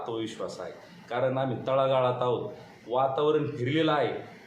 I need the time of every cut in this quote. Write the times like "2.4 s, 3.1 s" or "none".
2.7 s

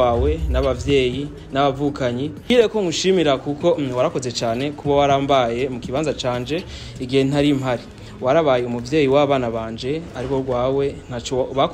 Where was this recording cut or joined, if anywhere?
none

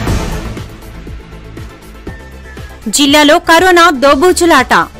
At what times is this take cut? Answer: none

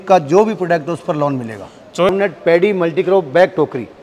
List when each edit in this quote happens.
2.1 s

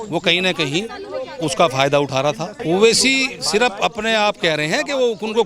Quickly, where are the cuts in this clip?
2.5 s

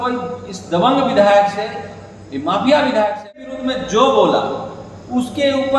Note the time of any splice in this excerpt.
3.4 s

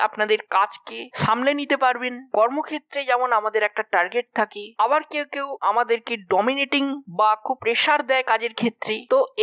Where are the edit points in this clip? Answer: none

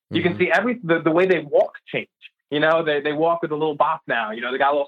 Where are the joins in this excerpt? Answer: none

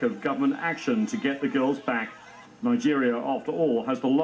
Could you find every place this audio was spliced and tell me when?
none

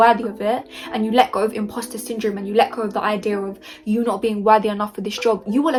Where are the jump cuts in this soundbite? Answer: none

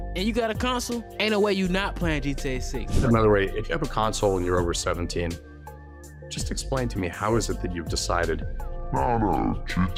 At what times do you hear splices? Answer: none

